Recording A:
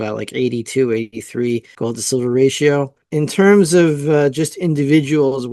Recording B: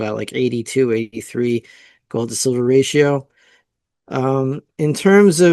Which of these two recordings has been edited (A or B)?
A